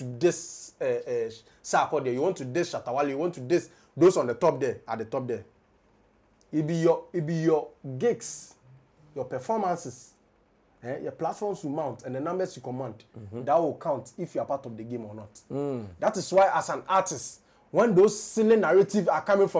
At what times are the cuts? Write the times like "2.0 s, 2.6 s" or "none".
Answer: none